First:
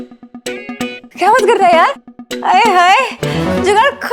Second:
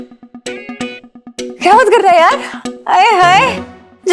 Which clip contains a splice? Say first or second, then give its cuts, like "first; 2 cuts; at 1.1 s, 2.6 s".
first; 1 cut; at 1.1 s